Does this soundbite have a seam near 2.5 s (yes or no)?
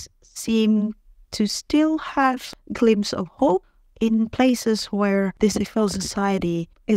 yes